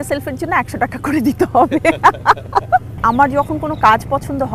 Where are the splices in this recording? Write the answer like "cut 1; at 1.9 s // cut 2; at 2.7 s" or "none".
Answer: cut 1; at 2.9 s

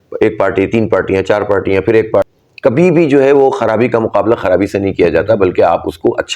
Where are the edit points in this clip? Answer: cut 1; at 2.2 s

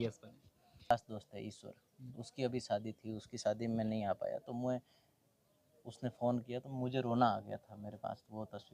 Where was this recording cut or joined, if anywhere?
cut 1; at 0.9 s

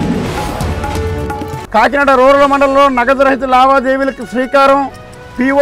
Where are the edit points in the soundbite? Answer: none

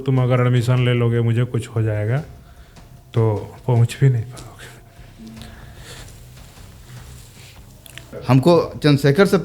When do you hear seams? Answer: cut 1; at 8.1 s

